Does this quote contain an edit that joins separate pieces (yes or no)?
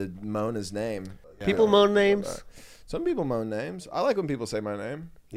yes